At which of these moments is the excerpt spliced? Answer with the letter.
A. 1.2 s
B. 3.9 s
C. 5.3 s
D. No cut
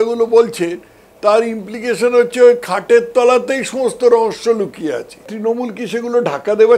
C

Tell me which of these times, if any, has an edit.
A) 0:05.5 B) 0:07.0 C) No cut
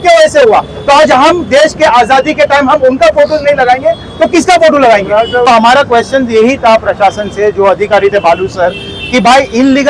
A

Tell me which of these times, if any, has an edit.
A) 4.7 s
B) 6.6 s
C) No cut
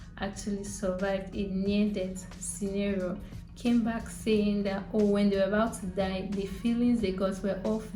C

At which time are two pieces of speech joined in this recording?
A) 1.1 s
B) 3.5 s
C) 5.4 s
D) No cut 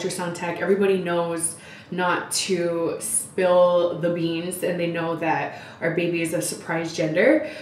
D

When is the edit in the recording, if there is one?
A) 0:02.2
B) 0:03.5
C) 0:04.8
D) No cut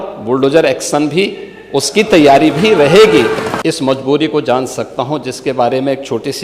B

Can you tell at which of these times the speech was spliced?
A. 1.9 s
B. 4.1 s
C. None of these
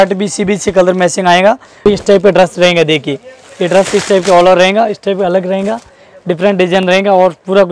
A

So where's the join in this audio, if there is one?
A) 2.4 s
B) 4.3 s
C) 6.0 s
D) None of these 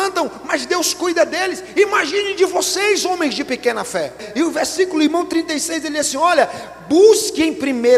B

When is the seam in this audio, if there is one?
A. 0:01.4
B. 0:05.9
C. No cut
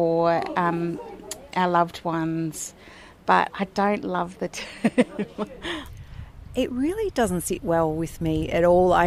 B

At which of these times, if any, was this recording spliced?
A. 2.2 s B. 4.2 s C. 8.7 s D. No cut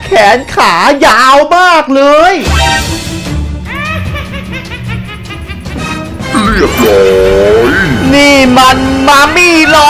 D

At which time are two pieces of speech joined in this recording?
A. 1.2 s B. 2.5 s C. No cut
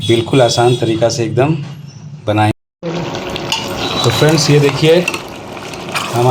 B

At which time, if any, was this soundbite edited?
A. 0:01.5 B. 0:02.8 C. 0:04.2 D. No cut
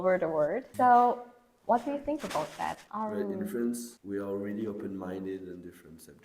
B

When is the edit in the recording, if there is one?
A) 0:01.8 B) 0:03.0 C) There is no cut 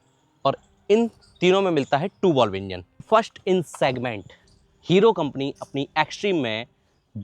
B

